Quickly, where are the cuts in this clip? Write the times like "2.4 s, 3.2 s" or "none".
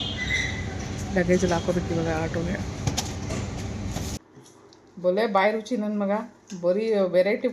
4.3 s